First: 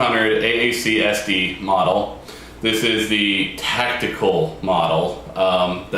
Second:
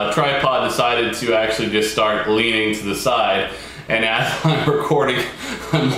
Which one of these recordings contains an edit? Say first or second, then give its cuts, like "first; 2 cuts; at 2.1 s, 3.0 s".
first; 1 cut; at 2.2 s